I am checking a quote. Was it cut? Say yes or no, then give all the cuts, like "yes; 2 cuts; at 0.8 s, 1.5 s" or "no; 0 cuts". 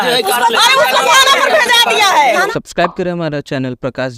yes; 1 cut; at 2.5 s